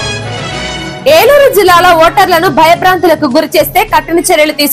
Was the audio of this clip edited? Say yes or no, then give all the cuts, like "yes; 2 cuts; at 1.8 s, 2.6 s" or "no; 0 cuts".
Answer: yes; 1 cut; at 1.0 s